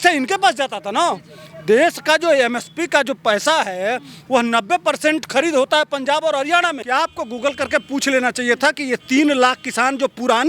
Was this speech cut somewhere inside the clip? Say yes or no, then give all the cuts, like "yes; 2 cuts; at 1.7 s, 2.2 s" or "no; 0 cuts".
yes; 1 cut; at 6.8 s